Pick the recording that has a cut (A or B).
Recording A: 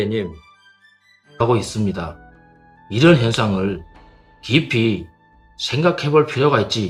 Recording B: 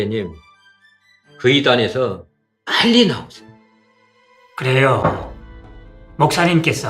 B